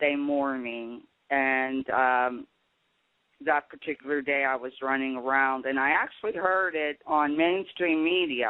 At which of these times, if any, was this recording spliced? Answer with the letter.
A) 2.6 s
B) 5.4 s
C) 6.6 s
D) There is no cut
C